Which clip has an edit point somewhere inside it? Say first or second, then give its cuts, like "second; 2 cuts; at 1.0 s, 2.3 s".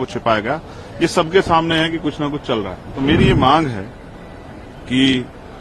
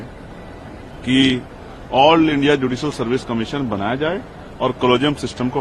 first; 1 cut; at 2.8 s